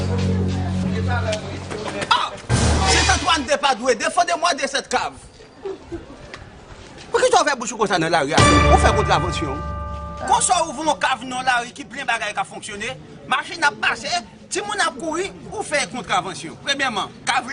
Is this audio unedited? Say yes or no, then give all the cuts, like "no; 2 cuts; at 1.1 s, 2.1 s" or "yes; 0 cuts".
no; 1 cut; at 1.1 s